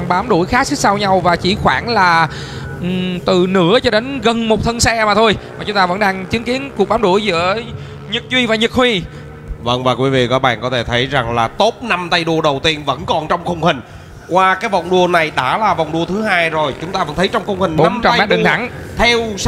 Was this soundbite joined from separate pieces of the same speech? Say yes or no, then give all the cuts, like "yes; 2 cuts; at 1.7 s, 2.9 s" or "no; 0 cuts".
no; 0 cuts